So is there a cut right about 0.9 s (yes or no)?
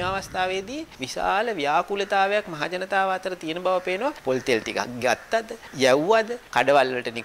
yes